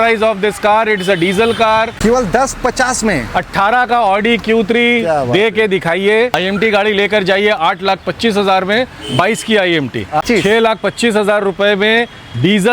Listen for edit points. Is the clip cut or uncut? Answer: cut